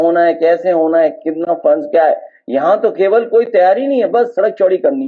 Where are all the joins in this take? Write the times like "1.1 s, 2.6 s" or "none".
none